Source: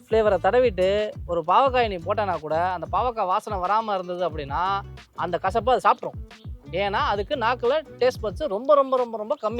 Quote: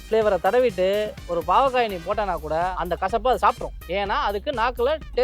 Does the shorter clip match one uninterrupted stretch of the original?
no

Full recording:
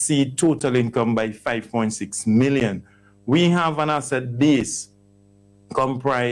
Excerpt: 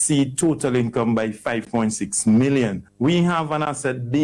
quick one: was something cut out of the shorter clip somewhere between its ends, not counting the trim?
yes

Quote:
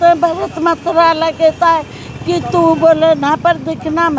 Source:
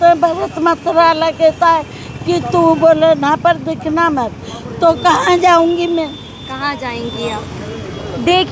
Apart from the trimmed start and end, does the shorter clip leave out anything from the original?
no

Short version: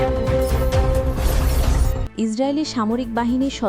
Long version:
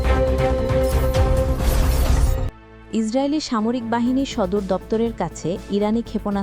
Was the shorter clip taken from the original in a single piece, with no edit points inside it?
no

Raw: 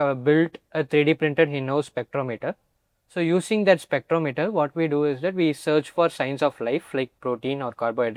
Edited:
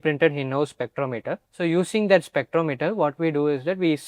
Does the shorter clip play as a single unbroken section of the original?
no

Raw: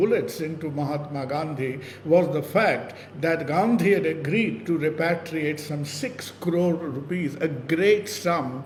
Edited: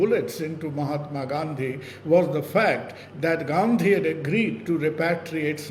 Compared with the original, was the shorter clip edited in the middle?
no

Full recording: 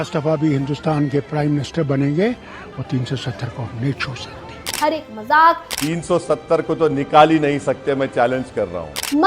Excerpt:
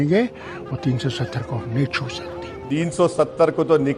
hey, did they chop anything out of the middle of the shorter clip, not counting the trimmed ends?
yes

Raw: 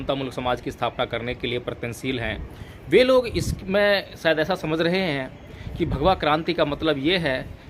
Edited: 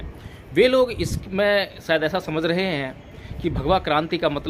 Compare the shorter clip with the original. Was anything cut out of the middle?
no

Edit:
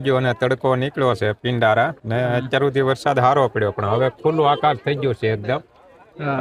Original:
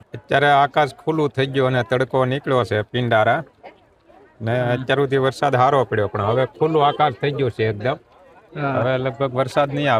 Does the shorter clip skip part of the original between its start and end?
yes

